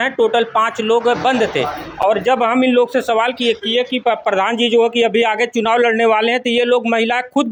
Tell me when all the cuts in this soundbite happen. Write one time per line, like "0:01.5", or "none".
none